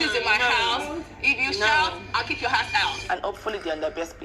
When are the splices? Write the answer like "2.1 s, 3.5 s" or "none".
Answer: 3.0 s